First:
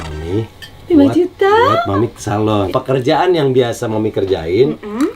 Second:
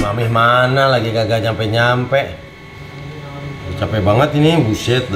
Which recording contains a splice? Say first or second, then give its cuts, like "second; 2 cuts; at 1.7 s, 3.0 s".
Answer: first; 1 cut; at 2.7 s